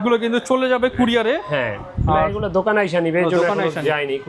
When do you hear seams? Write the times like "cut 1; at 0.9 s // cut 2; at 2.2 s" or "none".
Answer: none